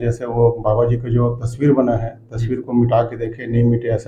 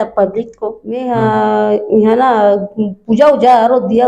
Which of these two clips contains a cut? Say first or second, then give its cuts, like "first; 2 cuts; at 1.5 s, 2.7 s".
second; 1 cut; at 1.0 s